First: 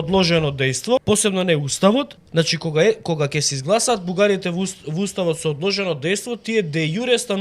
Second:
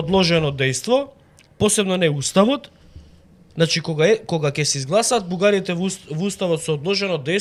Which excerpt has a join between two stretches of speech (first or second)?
first